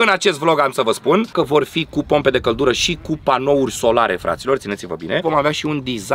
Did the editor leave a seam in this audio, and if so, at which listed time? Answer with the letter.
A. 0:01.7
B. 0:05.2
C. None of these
B